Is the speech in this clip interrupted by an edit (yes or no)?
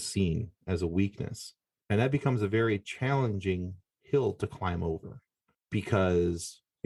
no